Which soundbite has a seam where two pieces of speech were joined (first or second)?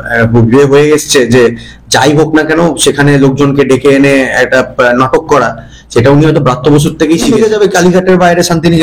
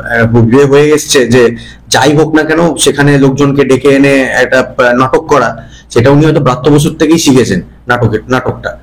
first